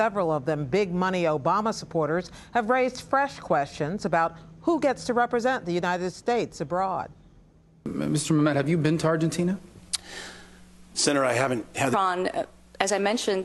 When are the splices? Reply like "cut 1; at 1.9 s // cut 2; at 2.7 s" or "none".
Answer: none